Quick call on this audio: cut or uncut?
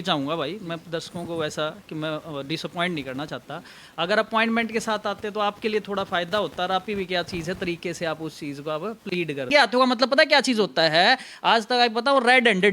cut